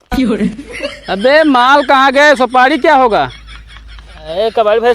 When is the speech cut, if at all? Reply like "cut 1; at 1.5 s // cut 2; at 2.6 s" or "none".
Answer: cut 1; at 1.0 s

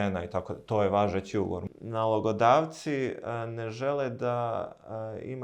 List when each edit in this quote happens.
cut 1; at 1.6 s

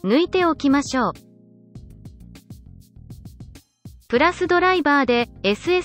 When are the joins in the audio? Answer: cut 1; at 1.1 s // cut 2; at 4.0 s

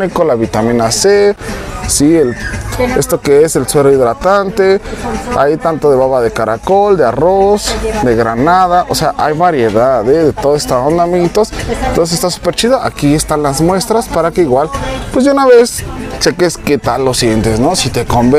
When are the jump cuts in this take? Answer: none

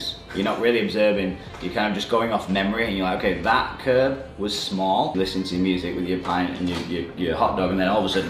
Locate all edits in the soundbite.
cut 1; at 5.1 s

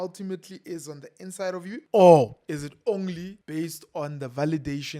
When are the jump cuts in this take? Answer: cut 1; at 1.8 s // cut 2; at 2.4 s // cut 3; at 3.3 s

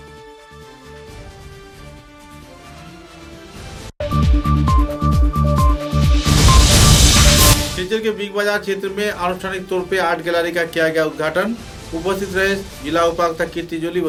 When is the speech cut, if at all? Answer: none

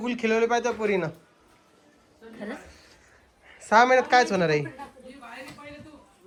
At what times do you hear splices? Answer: none

